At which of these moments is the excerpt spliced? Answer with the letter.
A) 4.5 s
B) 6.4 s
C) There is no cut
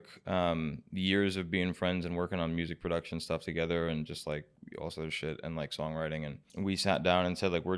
B